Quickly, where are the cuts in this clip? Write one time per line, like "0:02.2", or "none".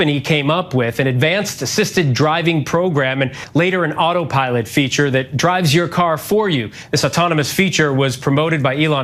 none